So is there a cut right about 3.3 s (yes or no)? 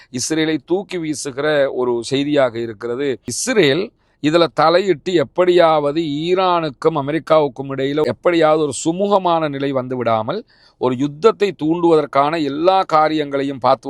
yes